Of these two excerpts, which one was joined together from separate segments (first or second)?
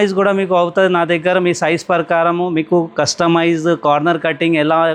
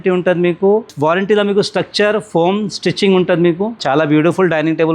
second